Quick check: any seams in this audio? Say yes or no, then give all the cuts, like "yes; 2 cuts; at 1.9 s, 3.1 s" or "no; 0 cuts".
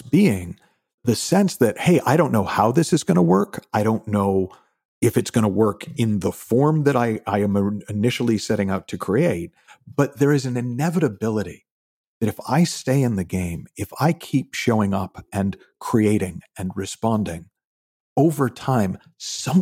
yes; 1 cut; at 1.0 s